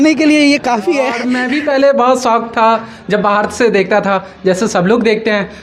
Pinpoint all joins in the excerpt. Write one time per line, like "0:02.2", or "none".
0:01.1